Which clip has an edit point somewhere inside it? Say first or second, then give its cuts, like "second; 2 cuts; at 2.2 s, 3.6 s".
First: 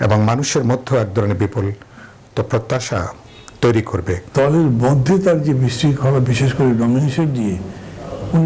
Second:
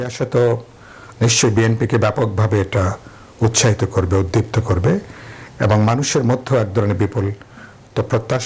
first; 1 cut; at 4.2 s